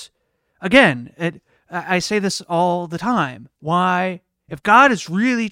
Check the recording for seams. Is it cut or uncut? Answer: cut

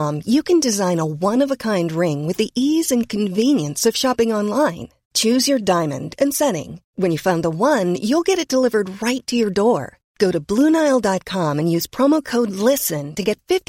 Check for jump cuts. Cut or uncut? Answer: uncut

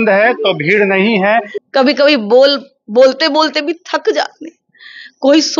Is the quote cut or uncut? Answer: cut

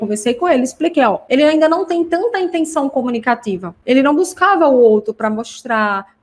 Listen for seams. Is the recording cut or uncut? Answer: cut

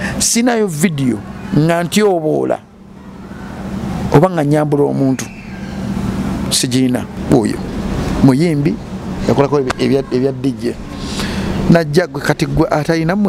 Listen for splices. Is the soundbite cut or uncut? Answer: cut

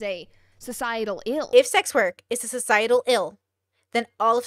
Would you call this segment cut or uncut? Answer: cut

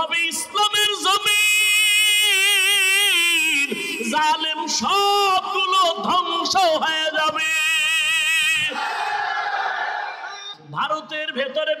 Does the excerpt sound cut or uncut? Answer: cut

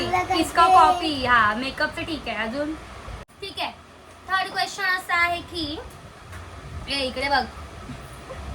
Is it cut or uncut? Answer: cut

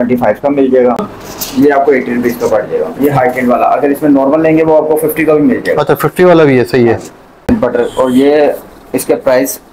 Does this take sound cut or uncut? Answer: cut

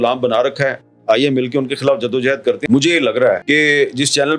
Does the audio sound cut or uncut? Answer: cut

